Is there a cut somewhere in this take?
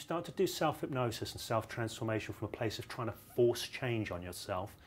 no; 0 cuts

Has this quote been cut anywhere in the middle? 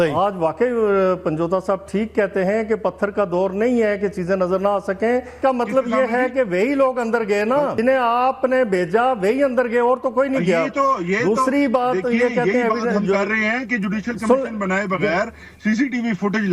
yes; 2 cuts; at 5.3 s, 7.8 s

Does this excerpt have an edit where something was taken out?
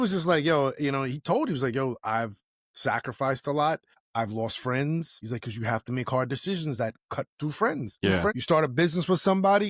yes; 3 cuts; at 4.0 s, 5.2 s, 8.1 s

